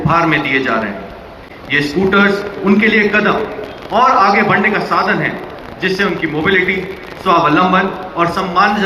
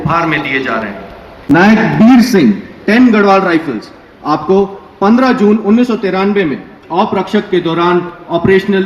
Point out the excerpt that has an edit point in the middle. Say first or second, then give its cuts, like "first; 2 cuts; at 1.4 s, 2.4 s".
second; 1 cut; at 1.5 s